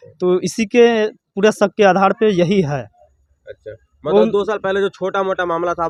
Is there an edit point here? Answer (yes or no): no